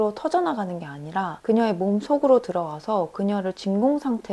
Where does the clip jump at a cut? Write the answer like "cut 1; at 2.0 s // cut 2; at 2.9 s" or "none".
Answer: cut 1; at 1.3 s